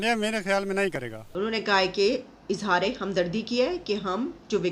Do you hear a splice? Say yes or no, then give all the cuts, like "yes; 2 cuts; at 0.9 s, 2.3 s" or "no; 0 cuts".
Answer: yes; 1 cut; at 1.2 s